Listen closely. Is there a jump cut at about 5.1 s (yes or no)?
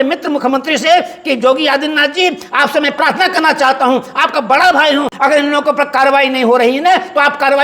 yes